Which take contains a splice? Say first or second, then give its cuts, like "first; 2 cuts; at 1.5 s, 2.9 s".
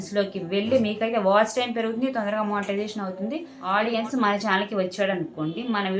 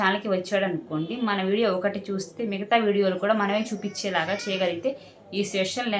first; 1 cut; at 3.5 s